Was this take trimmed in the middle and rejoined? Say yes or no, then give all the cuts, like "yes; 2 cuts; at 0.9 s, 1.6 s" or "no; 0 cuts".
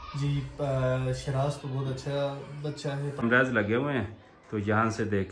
yes; 1 cut; at 3.2 s